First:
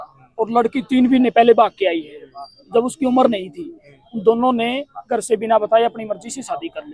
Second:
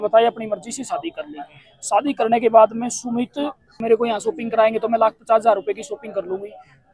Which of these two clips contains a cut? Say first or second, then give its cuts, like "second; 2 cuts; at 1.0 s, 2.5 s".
second; 1 cut; at 3.8 s